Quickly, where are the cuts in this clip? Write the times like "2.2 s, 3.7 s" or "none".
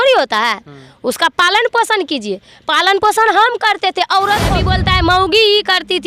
4.7 s